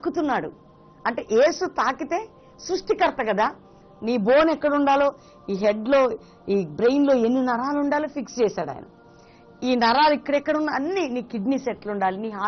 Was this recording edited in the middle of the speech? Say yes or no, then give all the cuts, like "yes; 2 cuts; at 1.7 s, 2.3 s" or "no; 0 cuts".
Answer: no; 0 cuts